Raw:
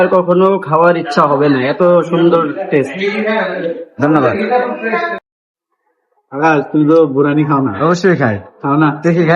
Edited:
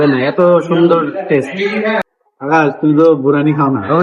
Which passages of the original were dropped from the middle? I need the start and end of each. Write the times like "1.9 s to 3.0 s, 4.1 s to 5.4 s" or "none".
3.5 s to 6.0 s